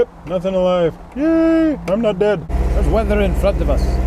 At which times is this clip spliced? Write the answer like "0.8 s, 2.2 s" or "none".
2.6 s